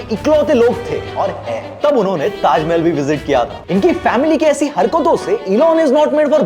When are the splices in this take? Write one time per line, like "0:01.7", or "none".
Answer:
0:01.8